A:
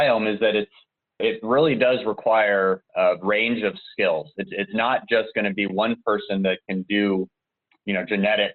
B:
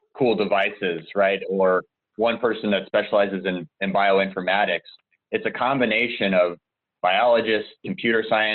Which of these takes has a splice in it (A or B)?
A